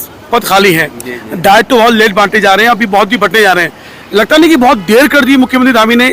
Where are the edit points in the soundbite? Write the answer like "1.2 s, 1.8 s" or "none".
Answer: none